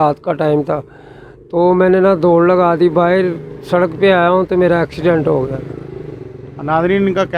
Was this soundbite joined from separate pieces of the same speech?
no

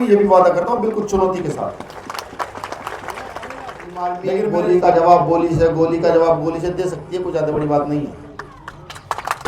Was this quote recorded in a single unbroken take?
no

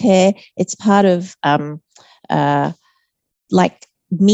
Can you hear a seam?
no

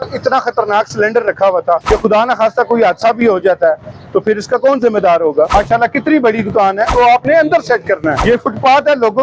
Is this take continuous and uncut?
no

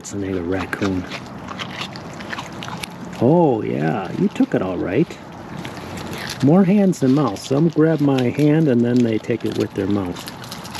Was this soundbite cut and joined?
no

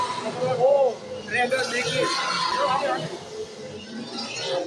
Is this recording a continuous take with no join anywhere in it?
no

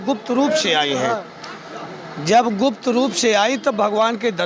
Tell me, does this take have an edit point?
no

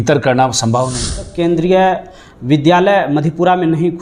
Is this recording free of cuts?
no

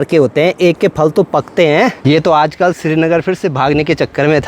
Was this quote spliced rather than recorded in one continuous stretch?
yes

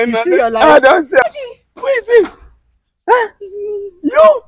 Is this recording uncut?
no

